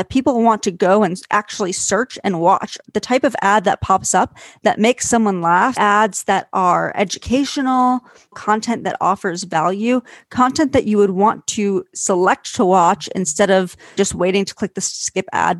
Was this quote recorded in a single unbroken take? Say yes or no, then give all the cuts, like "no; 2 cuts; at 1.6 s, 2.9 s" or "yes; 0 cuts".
no; 4 cuts; at 2.8 s, 5.8 s, 8.4 s, 13.9 s